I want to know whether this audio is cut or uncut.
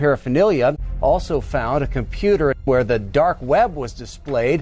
cut